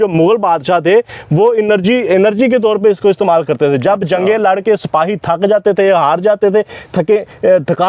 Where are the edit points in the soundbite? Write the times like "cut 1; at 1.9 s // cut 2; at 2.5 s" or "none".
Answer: none